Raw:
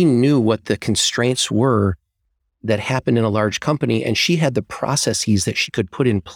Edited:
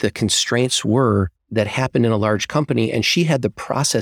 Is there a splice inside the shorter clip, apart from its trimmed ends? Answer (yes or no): yes